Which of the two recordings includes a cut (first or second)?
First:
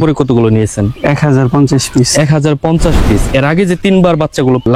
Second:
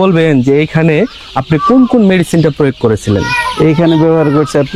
first